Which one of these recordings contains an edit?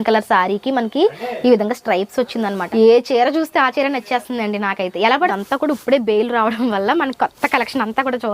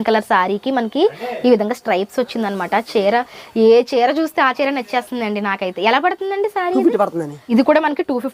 first; 2 cuts; at 2.6 s, 5.3 s

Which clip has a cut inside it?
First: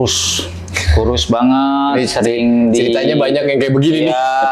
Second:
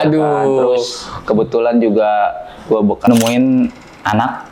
second; 1 cut; at 3.1 s

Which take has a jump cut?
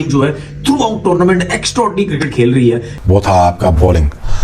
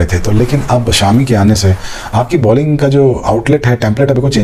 first; 1 cut; at 2.9 s

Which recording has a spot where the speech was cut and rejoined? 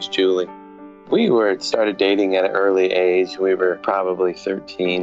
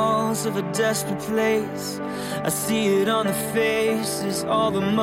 first; 2 cuts; at 1.0 s, 4.0 s

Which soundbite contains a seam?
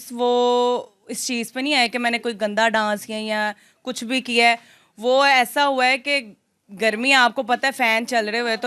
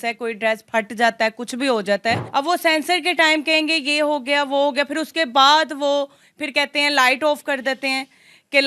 second; 1 cut; at 2.2 s

